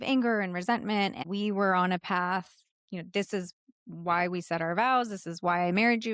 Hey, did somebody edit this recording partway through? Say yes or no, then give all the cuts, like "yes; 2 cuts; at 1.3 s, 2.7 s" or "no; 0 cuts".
yes; 1 cut; at 1.2 s